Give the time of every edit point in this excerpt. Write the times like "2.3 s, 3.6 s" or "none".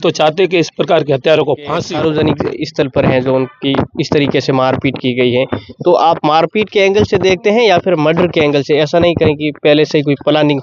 1.8 s